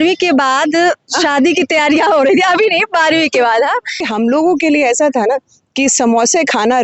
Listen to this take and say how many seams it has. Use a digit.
1